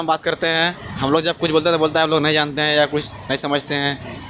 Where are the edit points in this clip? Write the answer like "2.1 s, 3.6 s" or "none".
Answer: none